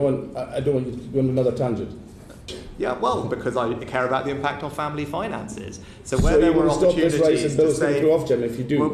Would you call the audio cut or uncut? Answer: cut